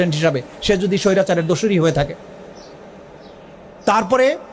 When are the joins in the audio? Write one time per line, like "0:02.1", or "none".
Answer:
none